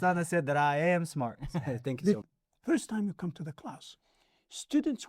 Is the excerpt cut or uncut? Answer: cut